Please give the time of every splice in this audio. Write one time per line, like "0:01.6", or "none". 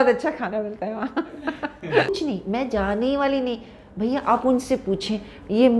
0:02.1